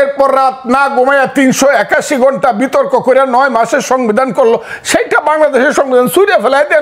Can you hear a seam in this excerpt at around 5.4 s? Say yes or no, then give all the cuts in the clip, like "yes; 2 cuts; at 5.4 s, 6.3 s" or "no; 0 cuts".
no; 0 cuts